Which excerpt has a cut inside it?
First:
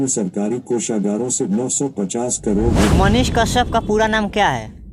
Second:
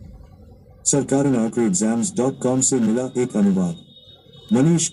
first; 1 cut; at 2.9 s

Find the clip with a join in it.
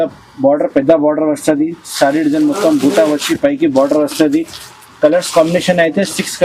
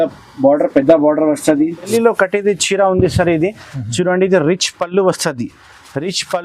second; 1 cut; at 1.9 s

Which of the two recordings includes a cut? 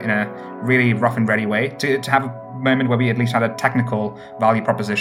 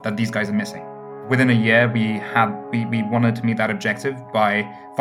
second; 1 cut; at 1.2 s

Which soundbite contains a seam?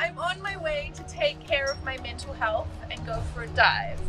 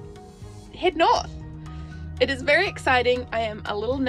first; 1 cut; at 1.4 s

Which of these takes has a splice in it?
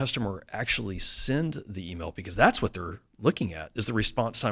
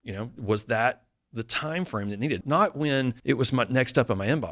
second; 2 cuts; at 2.4 s, 3.2 s

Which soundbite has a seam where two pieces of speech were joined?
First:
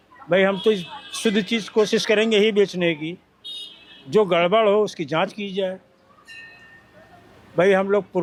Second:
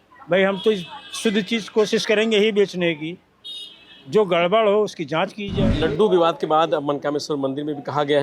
second; 1 cut; at 5.7 s

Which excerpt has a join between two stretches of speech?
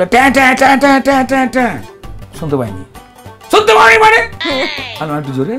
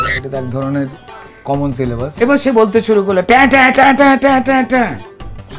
second; 1 cut; at 2.1 s

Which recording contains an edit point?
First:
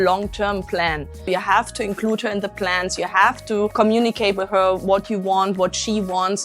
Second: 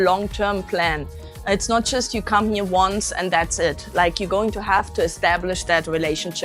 first; 2 cuts; at 1.2 s, 3.7 s

